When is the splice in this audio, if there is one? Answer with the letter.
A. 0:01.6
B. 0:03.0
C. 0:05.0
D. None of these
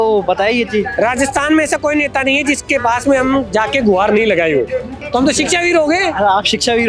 C